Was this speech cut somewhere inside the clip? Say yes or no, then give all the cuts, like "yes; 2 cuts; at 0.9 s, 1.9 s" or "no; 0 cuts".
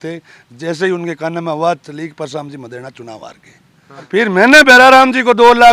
yes; 1 cut; at 4.1 s